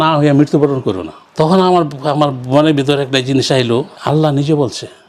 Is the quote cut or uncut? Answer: uncut